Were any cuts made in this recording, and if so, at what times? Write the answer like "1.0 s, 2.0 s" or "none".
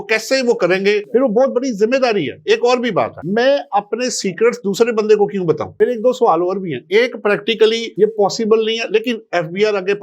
none